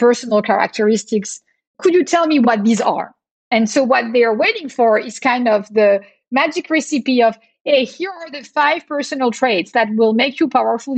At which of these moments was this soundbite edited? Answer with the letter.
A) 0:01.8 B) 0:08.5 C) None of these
A